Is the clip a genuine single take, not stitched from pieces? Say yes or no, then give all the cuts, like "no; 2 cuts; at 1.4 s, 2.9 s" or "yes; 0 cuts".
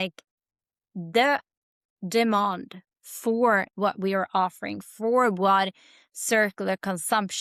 yes; 0 cuts